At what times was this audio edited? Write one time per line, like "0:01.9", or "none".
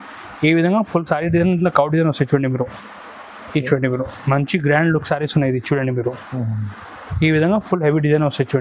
none